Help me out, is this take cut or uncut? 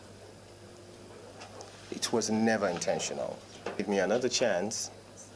cut